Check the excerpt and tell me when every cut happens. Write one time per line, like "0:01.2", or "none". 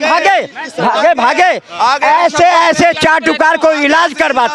none